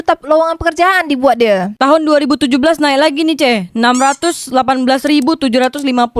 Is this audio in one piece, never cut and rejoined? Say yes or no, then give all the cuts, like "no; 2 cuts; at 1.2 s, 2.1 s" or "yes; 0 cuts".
yes; 0 cuts